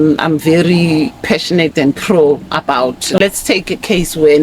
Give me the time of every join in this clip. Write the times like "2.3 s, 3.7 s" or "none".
3.2 s